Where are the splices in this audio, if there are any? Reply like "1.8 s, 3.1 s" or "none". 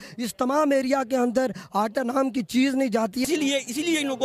3.2 s